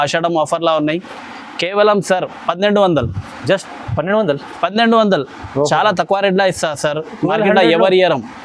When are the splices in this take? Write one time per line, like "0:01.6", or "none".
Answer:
none